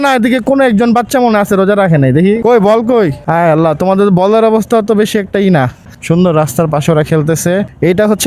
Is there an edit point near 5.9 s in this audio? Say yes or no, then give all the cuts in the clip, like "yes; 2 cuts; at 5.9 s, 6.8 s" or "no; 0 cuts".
yes; 2 cuts; at 2.4 s, 5.9 s